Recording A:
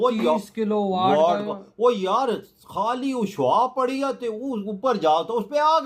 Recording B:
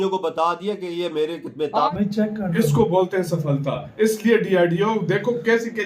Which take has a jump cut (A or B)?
B